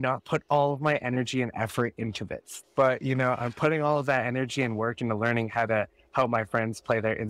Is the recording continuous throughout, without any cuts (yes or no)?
no